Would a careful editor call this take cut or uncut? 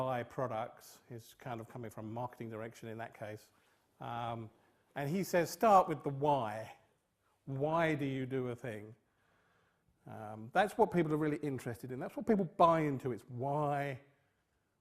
cut